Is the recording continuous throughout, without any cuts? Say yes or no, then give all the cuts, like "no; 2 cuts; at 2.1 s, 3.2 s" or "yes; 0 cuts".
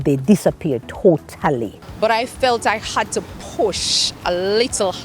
no; 1 cut; at 1.8 s